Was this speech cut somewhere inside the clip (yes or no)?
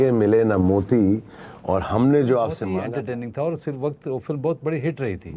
yes